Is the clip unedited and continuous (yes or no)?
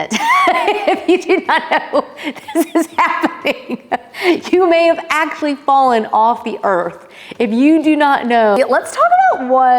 no